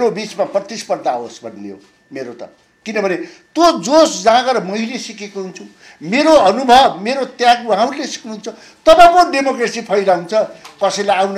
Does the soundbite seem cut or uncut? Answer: uncut